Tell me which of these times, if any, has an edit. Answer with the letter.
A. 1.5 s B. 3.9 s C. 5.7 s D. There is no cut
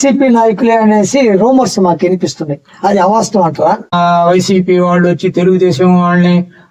B